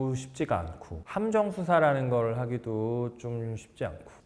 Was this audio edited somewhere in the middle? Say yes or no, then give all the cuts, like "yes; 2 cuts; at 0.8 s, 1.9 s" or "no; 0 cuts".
no; 0 cuts